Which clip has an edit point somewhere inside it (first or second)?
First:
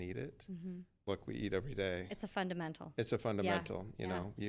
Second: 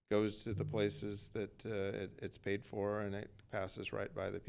first